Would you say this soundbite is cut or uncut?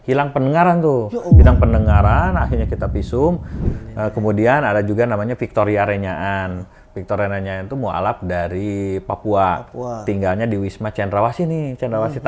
cut